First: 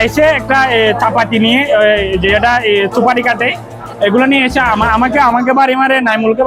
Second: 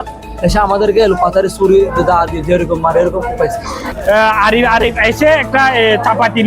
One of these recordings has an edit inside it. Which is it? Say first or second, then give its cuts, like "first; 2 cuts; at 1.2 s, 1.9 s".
second; 1 cut; at 3.9 s